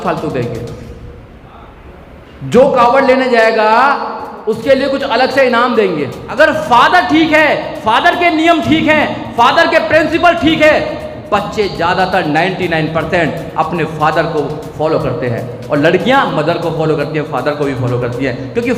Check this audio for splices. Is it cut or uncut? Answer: cut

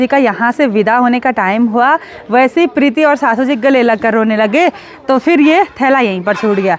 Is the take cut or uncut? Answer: uncut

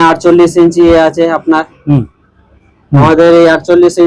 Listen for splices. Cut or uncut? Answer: uncut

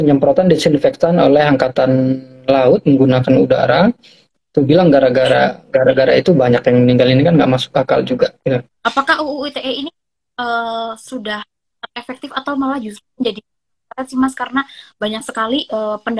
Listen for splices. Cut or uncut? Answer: cut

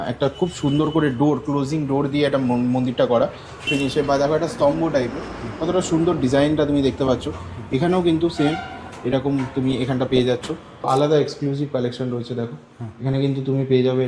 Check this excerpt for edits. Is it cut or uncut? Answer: cut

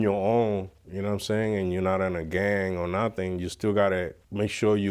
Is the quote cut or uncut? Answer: uncut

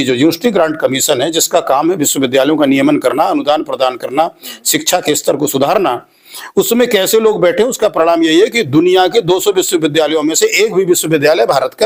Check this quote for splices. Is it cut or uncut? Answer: uncut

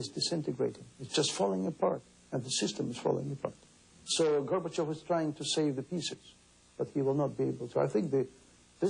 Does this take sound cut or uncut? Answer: uncut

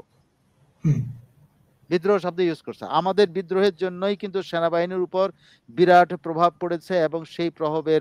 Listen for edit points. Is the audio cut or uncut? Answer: uncut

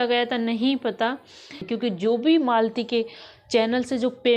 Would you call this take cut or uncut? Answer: cut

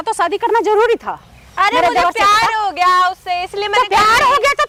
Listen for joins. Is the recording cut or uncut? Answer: uncut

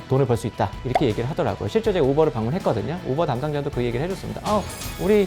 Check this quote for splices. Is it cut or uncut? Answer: uncut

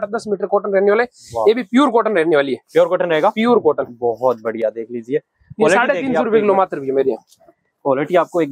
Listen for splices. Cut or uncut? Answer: uncut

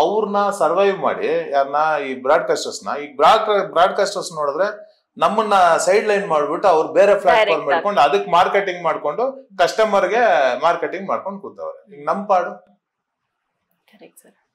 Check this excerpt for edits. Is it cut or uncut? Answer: uncut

